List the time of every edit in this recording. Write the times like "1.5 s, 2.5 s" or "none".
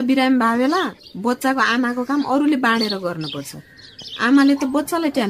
none